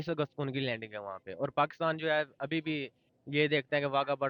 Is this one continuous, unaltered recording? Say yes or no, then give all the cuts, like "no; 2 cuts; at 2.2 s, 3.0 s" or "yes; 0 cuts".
yes; 0 cuts